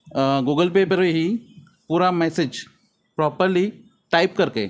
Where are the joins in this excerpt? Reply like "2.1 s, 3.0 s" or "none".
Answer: none

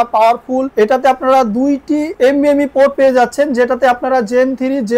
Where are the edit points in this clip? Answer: none

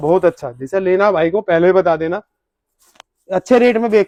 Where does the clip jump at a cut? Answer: none

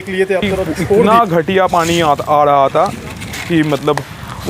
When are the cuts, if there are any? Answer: 1.0 s

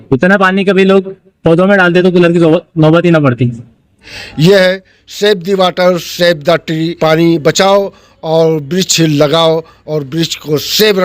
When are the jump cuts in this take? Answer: 4.1 s, 6.9 s

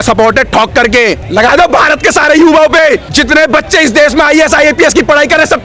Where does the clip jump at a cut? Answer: 1.2 s, 3.1 s

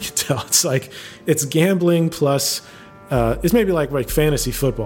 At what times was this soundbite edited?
none

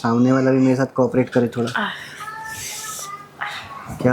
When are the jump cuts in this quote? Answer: none

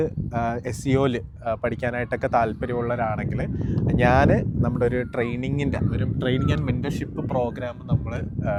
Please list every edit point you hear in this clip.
none

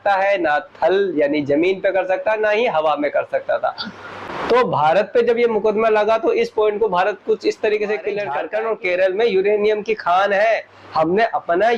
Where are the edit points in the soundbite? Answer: 8.4 s

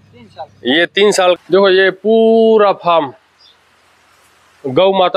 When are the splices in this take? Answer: 1.4 s

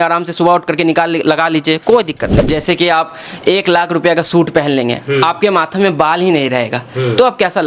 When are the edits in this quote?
2.5 s

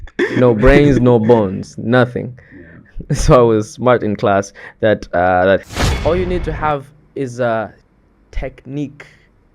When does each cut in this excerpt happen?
5.6 s

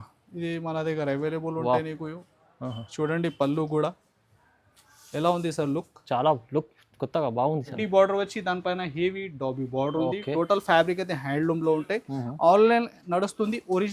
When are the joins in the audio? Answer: 7.8 s

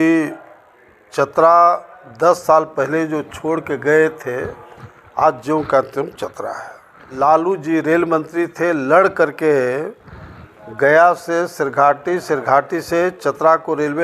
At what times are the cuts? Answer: 7.1 s

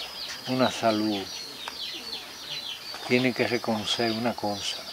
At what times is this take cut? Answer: none

